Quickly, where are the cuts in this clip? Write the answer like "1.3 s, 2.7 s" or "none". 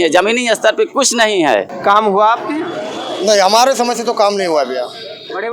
1.8 s